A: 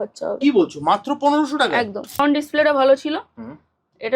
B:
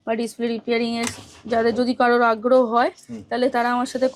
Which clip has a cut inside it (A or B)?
A